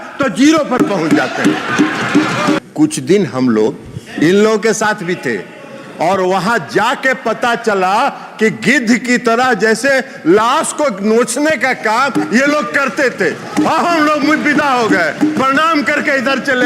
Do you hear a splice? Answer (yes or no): yes